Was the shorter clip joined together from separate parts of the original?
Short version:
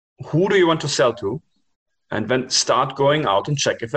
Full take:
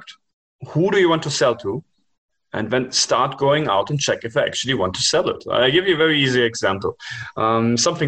no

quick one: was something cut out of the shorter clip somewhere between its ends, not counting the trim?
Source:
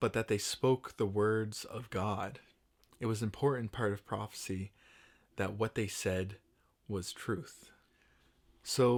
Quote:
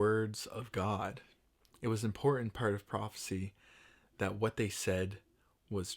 no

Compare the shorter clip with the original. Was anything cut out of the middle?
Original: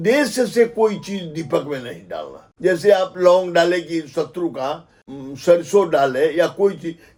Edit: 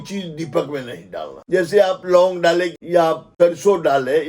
yes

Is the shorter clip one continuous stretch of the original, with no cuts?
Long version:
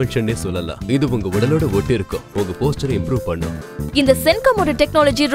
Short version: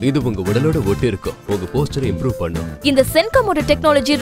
no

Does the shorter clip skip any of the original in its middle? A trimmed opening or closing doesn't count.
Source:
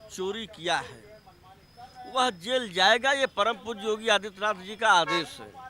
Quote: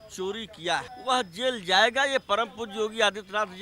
yes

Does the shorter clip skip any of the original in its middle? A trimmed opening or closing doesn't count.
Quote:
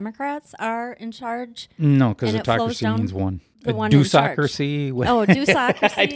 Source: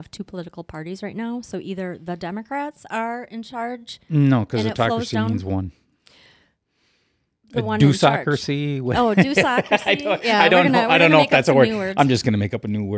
yes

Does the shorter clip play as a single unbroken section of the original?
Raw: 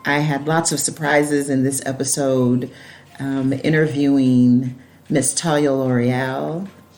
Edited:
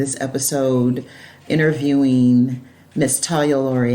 no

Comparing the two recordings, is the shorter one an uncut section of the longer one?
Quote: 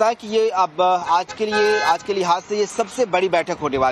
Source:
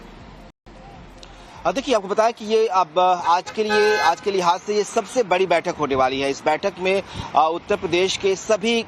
yes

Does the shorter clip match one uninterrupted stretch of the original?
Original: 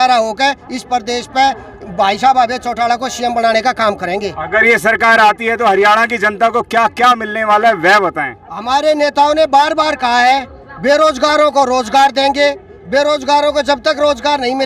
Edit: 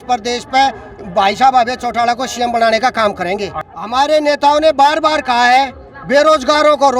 no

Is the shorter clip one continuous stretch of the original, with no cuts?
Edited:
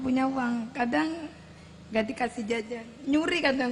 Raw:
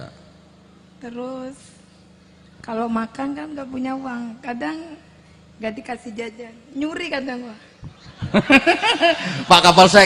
yes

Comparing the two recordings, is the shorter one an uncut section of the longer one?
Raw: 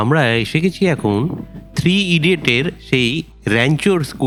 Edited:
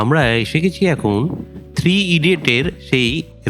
yes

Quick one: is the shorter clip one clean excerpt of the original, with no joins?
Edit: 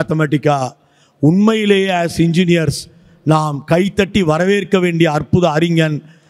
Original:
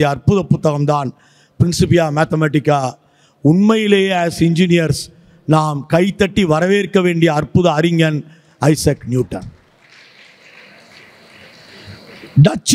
yes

